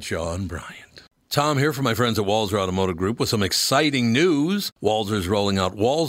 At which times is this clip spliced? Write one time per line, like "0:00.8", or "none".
0:01.2